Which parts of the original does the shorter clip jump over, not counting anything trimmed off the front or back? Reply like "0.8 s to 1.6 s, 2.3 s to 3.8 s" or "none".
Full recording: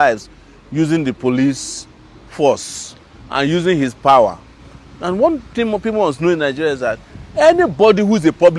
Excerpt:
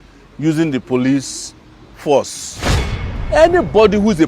3.3 s to 7.0 s